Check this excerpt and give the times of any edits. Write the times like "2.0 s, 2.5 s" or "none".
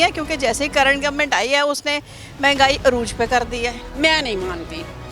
3.8 s